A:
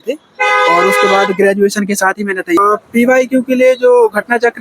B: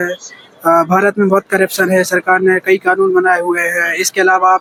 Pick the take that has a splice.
A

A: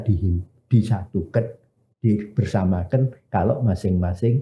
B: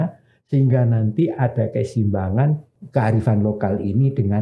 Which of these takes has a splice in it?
B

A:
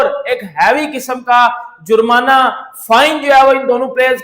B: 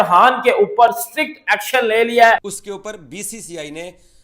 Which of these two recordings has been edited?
B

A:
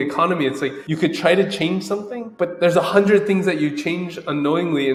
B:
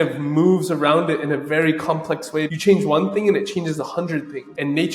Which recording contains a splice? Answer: B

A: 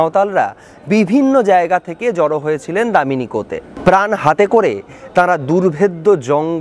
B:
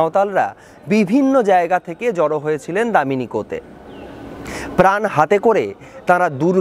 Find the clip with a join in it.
A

